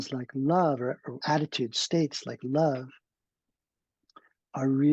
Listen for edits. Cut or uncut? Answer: cut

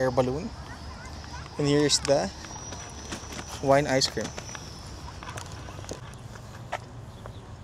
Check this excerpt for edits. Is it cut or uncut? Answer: cut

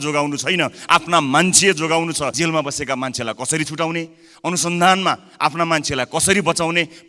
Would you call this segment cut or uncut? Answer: cut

